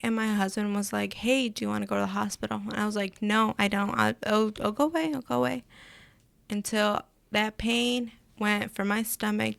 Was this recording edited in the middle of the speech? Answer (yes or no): no